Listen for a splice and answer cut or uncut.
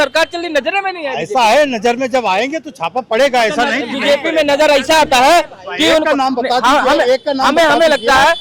uncut